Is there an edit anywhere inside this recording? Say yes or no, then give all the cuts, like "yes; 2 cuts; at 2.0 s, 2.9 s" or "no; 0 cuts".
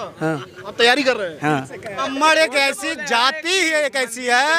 yes; 1 cut; at 2.0 s